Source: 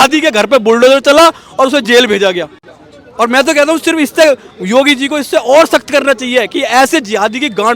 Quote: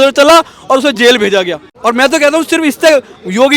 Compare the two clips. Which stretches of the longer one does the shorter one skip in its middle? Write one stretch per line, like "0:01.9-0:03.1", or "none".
0:02.5-0:03.0